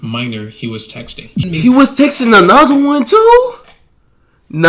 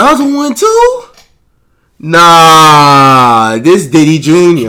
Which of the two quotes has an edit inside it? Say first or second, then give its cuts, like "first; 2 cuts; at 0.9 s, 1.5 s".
first; 1 cut; at 1.4 s